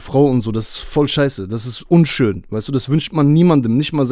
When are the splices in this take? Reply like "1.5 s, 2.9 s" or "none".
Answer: none